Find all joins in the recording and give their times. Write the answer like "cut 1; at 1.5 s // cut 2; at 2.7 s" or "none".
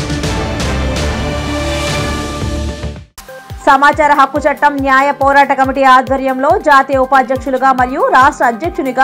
cut 1; at 3.4 s